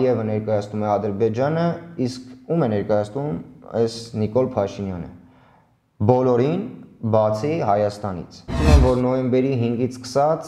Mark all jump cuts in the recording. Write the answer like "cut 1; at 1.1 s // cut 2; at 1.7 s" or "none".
cut 1; at 8.6 s